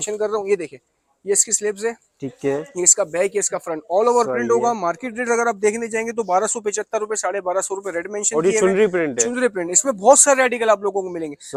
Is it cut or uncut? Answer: uncut